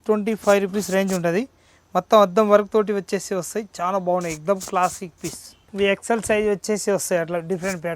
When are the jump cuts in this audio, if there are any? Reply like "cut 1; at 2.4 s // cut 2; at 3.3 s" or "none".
none

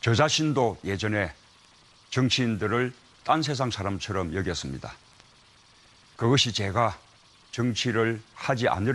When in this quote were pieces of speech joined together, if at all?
none

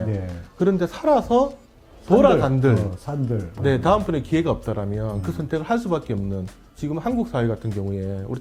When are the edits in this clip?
cut 1; at 6.6 s

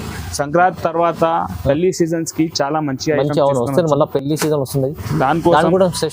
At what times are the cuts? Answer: none

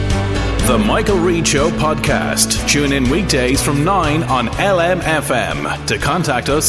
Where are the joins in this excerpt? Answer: none

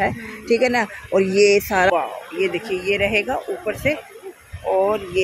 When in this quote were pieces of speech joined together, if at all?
cut 1; at 1.9 s

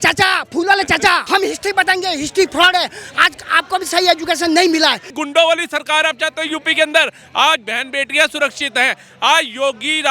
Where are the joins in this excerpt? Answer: cut 1; at 1.2 s // cut 2; at 5.1 s

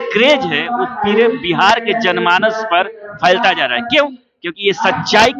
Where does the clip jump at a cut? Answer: none

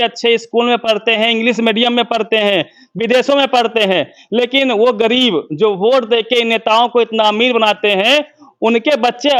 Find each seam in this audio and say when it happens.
none

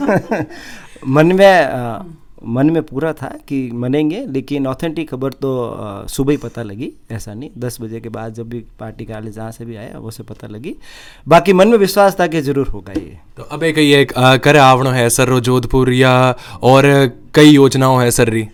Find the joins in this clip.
none

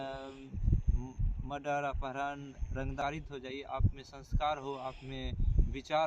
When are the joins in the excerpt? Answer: cut 1; at 3.0 s

